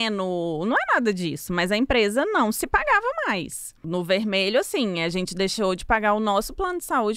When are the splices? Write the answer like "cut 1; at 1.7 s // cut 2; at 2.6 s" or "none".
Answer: cut 1; at 3.9 s